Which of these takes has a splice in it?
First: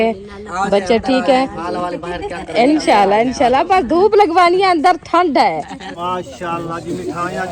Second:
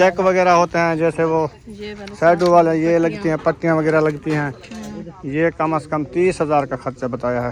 first; 1 cut; at 5.9 s

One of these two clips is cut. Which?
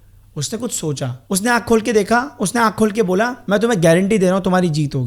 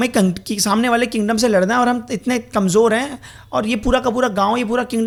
first; 2 cuts; at 1.2 s, 3.4 s

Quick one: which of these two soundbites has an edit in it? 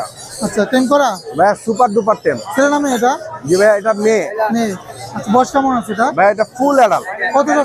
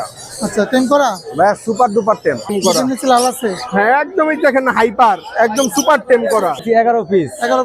second; 2 cuts; at 2.5 s, 6.6 s

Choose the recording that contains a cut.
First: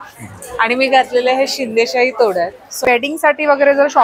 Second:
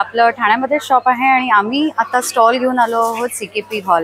first; 1 cut; at 2.6 s

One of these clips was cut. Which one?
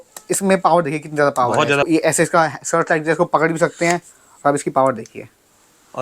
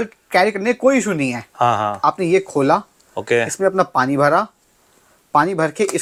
first; 1 cut; at 1.9 s

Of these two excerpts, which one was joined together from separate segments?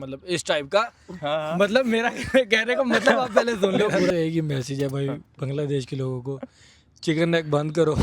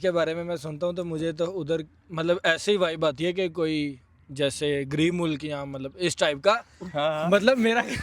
first; 1 cut; at 4.1 s

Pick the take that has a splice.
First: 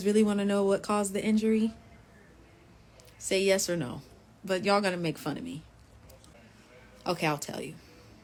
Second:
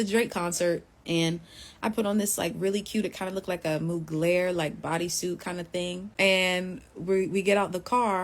second; 2 cuts; at 0.9 s, 6.0 s

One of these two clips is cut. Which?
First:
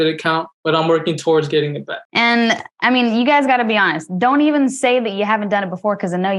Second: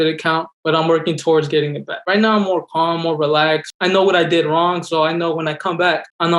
second; 1 cut; at 2.0 s

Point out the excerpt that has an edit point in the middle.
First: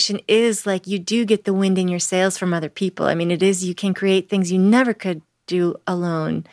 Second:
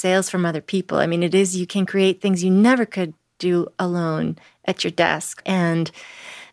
second; 1 cut; at 5.4 s

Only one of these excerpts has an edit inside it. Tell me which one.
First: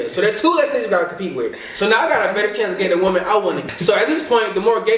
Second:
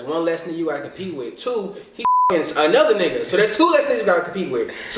first; 1 cut; at 3.7 s

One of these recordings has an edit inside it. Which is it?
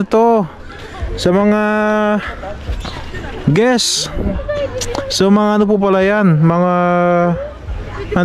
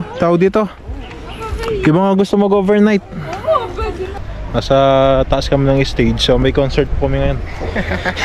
second; 1 cut; at 4.3 s

